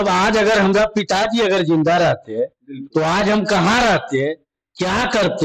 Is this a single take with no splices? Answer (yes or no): yes